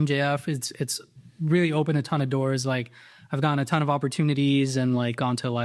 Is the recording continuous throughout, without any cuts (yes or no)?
yes